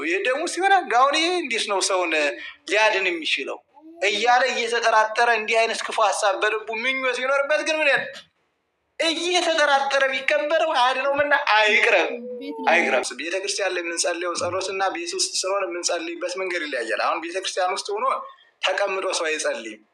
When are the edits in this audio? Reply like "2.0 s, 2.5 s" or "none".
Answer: 13.0 s